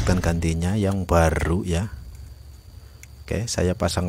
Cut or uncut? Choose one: uncut